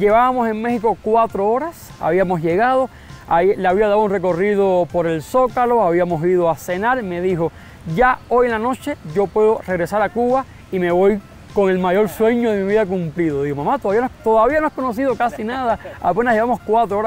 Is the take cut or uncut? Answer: uncut